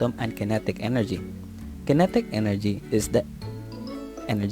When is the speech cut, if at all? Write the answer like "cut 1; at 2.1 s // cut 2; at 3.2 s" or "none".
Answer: cut 1; at 2.0 s